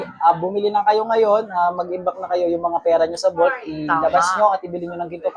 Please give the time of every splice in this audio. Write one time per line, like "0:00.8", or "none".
none